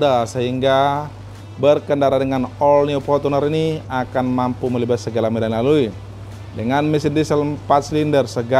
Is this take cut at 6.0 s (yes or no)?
no